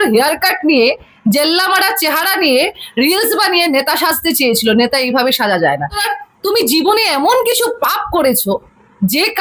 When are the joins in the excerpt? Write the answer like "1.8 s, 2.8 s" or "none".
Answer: 6.0 s